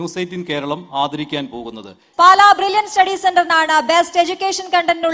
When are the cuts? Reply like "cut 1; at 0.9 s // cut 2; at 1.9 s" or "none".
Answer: cut 1; at 2.2 s